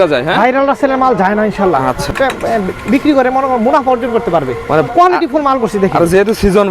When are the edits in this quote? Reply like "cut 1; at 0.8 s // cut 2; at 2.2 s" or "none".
cut 1; at 2.1 s // cut 2; at 4.9 s